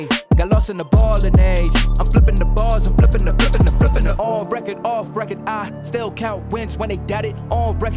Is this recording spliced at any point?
no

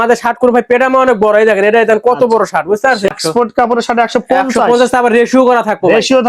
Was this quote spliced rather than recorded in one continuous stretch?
yes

